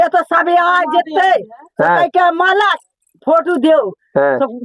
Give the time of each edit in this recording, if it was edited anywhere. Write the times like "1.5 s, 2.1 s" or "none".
none